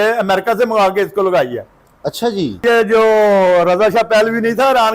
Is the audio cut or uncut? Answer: cut